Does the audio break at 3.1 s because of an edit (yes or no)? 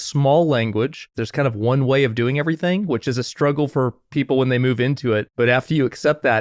no